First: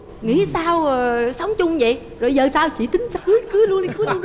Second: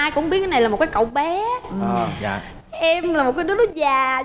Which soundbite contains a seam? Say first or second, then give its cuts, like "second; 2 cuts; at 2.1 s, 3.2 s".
first; 1 cut; at 3.2 s